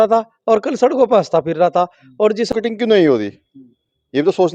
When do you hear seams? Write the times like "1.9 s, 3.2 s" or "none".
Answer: 2.5 s